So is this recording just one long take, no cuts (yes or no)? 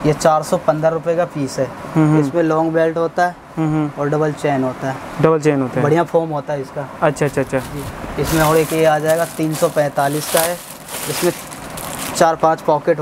yes